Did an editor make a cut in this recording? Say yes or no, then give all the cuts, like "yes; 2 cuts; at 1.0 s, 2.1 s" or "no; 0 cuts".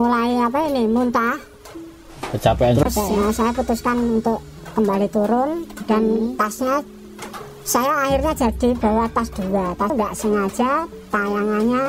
yes; 1 cut; at 9.9 s